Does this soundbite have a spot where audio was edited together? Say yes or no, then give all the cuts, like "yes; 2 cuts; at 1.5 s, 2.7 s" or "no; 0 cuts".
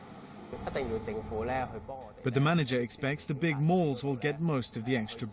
yes; 1 cut; at 3.0 s